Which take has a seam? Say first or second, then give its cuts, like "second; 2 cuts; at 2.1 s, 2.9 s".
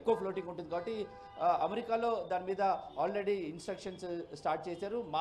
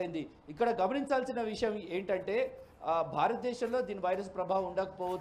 first; 1 cut; at 3.4 s